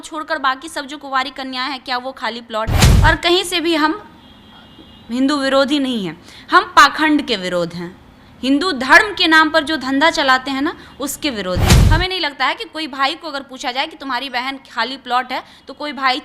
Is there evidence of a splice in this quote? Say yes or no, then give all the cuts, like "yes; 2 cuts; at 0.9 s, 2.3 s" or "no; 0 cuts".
yes; 2 cuts; at 2.8 s, 11.8 s